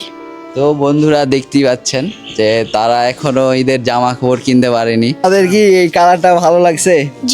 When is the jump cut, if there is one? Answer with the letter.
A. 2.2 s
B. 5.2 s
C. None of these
B